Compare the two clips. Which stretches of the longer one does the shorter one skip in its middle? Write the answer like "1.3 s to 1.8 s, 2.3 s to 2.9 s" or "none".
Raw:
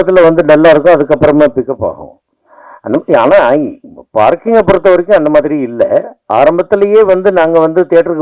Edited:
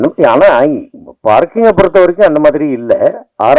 none